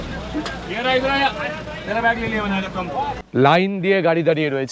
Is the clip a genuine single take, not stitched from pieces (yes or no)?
no